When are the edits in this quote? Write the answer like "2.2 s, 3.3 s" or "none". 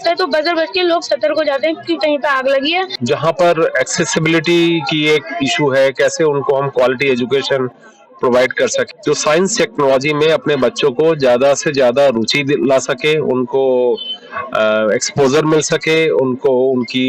2.9 s, 8.9 s